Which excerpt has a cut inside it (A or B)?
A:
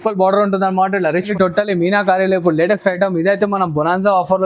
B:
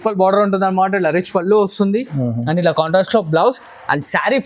A